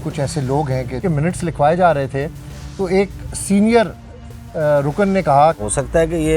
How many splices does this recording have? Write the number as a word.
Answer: two